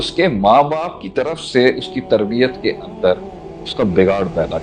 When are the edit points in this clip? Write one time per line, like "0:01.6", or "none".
none

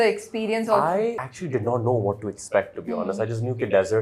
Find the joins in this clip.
0:01.3

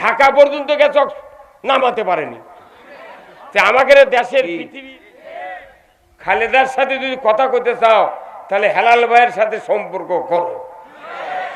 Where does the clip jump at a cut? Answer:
0:04.6

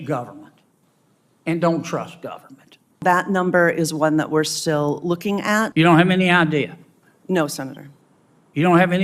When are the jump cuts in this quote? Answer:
0:03.0
0:05.7

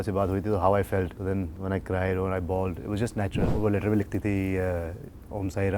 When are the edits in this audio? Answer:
0:01.2
0:03.4

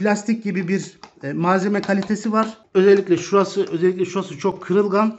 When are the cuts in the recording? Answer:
0:02.6

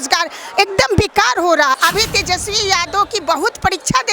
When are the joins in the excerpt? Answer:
0:01.8

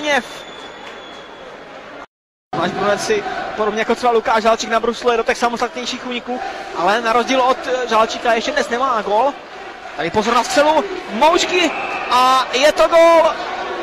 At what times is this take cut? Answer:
0:02.5

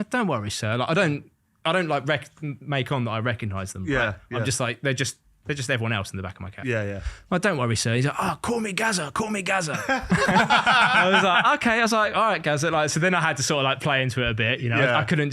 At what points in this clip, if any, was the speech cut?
none

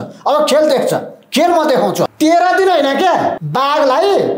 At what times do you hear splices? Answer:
0:02.1
0:03.4

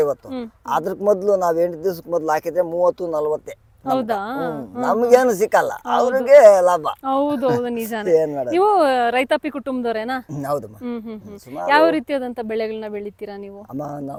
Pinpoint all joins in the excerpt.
none

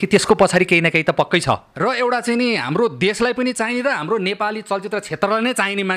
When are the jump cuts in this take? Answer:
0:01.7

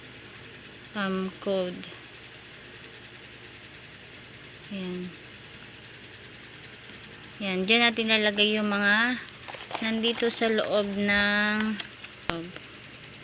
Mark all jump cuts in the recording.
0:12.3

